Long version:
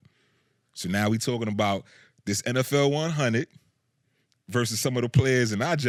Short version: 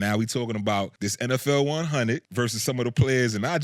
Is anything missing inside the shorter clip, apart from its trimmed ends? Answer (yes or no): yes